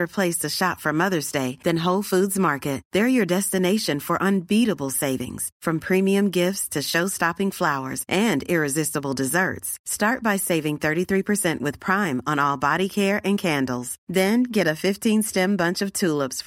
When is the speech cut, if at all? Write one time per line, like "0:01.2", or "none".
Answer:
none